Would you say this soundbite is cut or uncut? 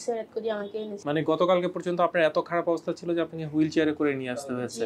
cut